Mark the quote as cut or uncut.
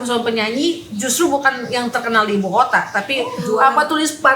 cut